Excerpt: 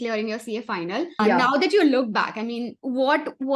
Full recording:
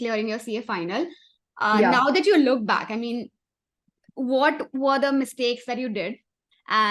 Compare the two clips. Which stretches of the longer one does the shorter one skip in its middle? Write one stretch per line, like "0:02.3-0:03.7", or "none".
0:01.2-0:01.7
0:03.3-0:04.1